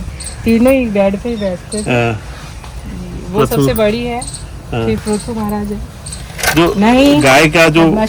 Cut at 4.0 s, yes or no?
no